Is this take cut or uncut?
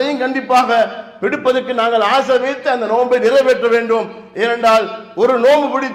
uncut